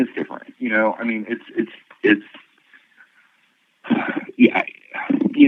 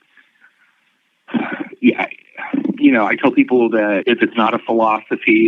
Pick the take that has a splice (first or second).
second